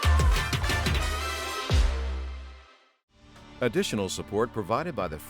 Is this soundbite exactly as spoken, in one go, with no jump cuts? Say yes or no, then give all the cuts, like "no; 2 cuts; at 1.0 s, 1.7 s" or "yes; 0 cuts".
no; 1 cut; at 3.4 s